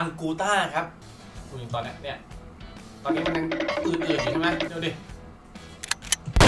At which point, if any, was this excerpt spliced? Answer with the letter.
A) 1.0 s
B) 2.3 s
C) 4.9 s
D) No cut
A